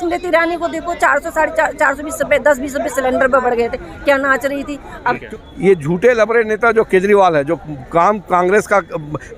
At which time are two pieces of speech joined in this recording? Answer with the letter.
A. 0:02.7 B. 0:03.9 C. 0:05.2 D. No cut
C